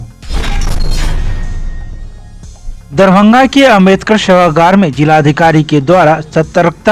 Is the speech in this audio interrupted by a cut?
no; 0 cuts

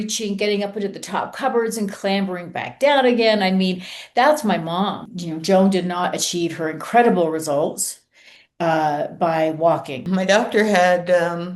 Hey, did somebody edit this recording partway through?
yes; 2 cuts; at 5.1 s, 10.1 s

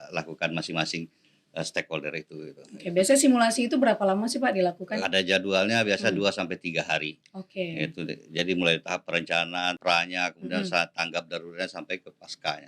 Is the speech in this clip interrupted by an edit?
yes; 2 cuts; at 4.9 s, 9.8 s

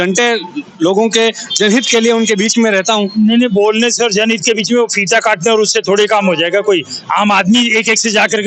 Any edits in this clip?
no; 0 cuts

